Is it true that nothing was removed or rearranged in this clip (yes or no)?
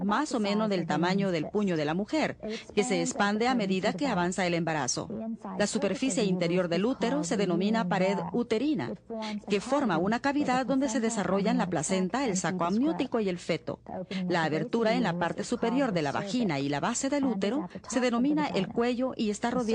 no